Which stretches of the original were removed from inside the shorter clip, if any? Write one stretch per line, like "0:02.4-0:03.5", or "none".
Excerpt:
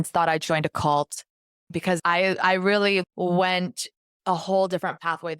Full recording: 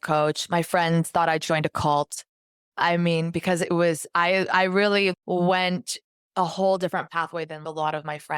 0:02.8-0:03.9